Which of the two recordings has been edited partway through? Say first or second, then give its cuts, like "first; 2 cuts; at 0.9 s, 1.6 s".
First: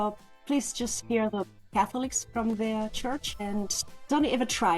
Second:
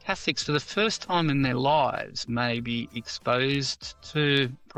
first; 2 cuts; at 1.0 s, 3.3 s